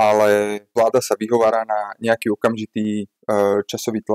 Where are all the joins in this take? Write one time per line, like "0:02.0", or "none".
none